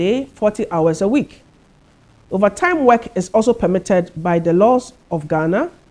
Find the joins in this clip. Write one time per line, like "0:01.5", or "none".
none

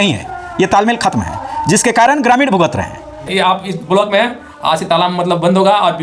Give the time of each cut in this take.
0:03.3

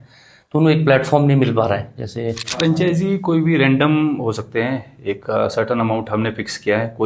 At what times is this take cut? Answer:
0:02.5

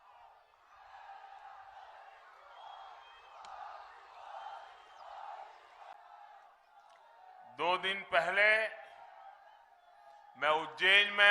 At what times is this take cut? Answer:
0:05.9

